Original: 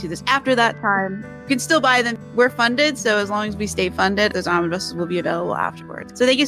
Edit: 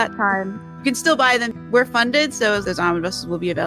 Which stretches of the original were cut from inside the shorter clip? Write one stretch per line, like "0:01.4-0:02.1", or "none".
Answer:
0:03.3-0:04.3